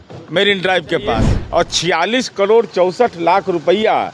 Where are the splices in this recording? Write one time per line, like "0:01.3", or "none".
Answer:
0:01.3